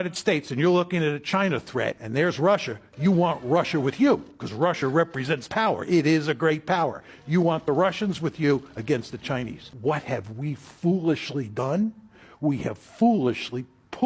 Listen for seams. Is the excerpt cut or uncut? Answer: cut